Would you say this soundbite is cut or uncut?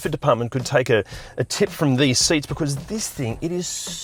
uncut